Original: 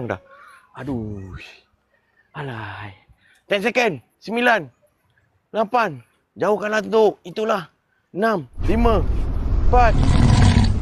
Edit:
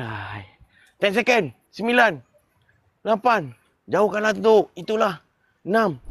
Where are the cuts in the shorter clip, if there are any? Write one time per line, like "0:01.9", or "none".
none